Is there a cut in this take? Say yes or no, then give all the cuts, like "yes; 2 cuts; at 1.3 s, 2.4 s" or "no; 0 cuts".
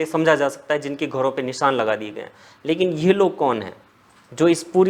no; 0 cuts